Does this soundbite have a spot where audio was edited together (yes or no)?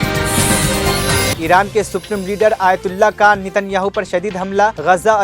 yes